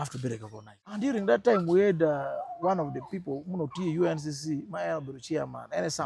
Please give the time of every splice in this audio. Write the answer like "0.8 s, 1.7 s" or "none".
1.0 s